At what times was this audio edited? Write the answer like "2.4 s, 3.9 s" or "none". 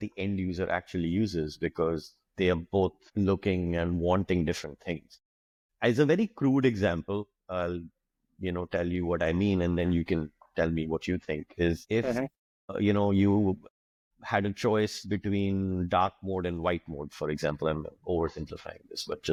none